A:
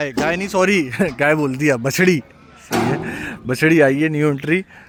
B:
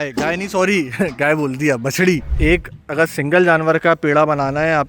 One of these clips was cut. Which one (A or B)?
B